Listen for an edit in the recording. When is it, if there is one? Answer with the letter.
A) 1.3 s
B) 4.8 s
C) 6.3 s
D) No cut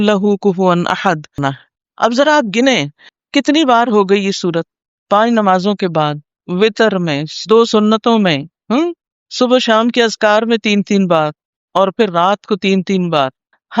A